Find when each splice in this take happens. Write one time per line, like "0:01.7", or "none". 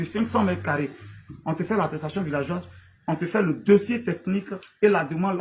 none